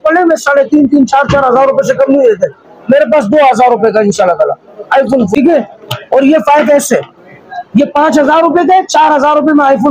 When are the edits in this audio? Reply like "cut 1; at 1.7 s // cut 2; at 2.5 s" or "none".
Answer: cut 1; at 5.3 s